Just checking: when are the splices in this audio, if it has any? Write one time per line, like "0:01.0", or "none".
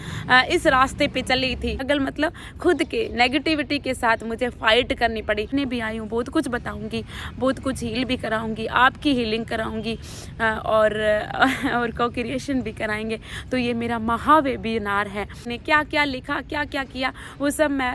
0:01.8
0:05.5
0:15.5